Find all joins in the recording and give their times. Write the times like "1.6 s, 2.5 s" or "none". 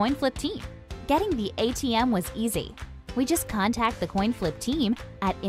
none